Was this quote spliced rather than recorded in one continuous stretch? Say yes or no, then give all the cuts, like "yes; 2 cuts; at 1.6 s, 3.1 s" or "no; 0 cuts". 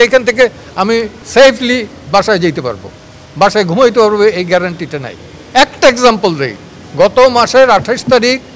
no; 0 cuts